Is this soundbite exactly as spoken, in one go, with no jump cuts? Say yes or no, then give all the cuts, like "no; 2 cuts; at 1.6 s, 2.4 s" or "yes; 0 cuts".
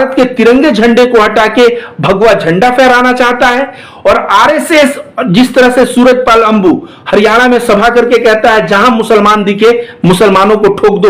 yes; 0 cuts